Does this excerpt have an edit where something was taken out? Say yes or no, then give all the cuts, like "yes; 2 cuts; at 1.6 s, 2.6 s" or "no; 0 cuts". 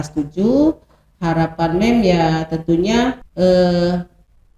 yes; 1 cut; at 3.3 s